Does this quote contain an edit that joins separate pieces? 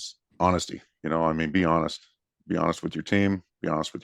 no; 0 cuts

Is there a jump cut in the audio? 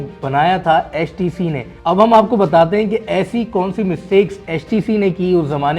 yes; 1 cut; at 1.7 s

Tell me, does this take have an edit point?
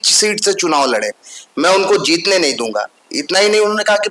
no; 0 cuts

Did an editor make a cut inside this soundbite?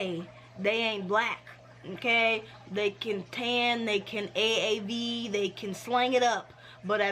no; 0 cuts

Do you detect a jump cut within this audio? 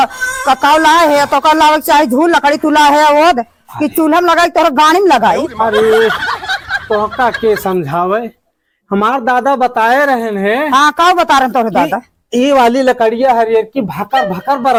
no; 0 cuts

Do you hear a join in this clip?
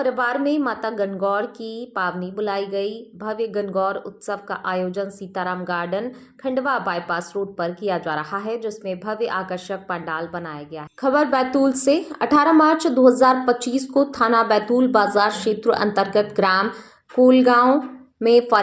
yes; 1 cut; at 10.8 s

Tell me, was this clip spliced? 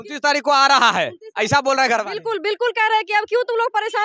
no; 0 cuts

